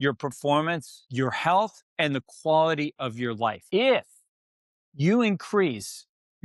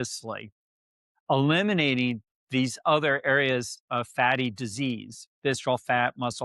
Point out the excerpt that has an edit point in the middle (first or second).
first